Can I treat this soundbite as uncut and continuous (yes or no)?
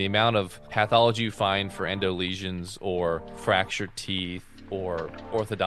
no